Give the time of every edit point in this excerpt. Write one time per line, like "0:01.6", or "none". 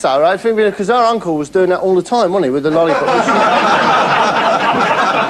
0:02.2